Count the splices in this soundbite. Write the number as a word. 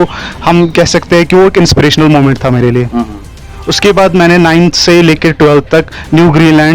one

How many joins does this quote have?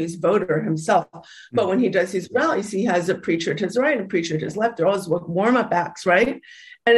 zero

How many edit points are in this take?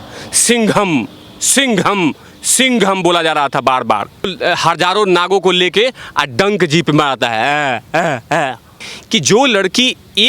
two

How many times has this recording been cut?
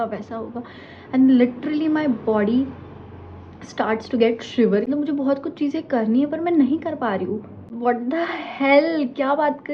two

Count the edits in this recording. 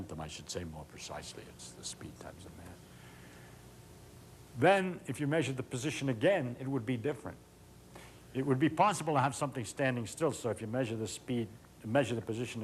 one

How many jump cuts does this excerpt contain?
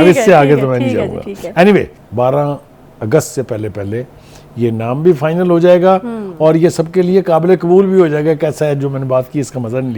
one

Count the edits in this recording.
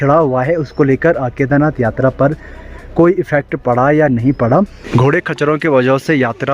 one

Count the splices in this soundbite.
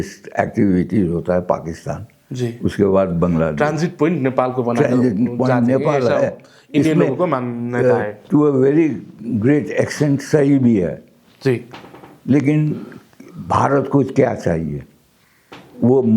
zero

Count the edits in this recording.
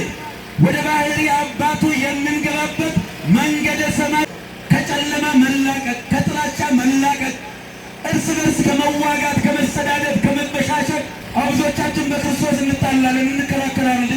two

